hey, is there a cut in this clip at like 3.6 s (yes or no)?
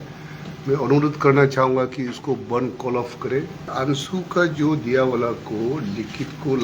yes